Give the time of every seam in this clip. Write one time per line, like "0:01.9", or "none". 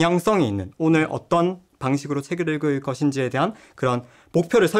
none